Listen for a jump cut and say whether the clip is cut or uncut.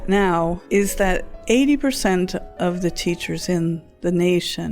cut